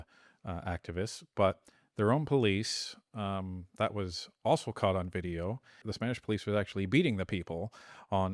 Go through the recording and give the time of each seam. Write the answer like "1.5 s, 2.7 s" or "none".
5.9 s